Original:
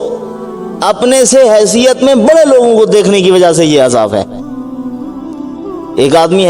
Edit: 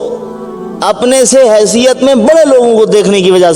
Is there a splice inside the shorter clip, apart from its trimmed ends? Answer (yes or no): no